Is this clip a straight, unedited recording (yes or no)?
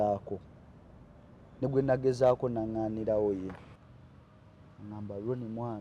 no